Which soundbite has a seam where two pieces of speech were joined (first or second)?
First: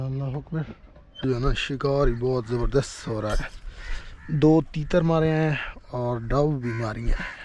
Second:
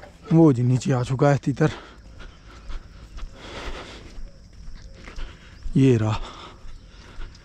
first